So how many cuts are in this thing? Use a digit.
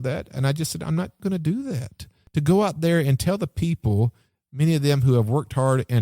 2